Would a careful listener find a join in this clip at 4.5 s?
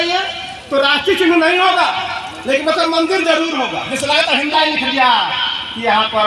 yes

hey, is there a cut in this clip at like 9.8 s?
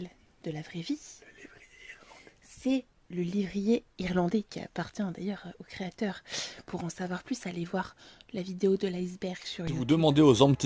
yes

